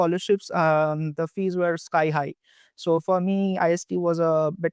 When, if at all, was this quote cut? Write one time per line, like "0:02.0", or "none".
none